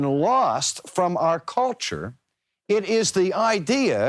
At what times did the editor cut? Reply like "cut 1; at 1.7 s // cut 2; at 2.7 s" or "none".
none